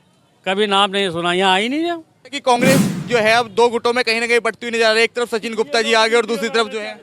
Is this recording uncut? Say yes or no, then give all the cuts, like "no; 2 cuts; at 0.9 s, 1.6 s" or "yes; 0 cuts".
no; 1 cut; at 2.6 s